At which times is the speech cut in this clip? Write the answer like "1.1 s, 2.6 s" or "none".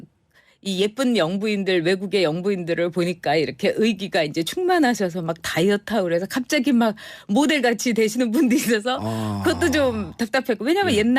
2.4 s